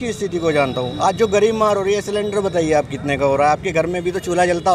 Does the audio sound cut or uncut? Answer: uncut